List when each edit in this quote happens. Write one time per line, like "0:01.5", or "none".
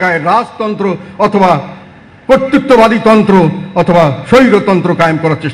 none